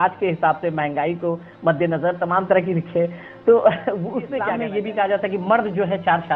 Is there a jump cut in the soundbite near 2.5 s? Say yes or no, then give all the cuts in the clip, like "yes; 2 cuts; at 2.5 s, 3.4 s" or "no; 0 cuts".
no; 1 cut; at 4.4 s